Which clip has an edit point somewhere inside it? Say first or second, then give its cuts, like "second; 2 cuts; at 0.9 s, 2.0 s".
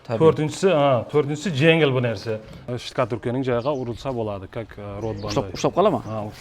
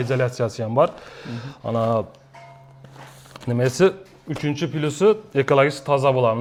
first; 1 cut; at 2.7 s